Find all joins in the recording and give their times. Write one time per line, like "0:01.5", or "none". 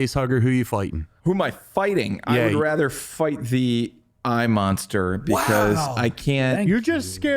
0:01.1